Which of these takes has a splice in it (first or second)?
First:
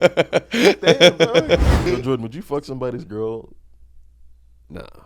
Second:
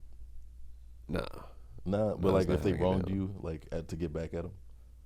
first